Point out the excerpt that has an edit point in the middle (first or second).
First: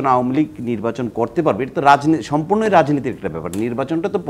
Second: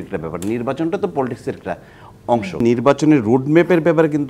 second